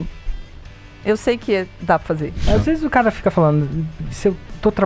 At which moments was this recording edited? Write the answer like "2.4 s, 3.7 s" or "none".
2.5 s